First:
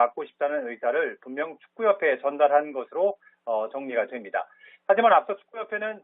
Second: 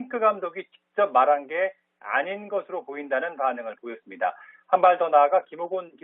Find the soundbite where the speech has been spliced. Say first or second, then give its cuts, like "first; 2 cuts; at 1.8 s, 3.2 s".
first; 1 cut; at 1.3 s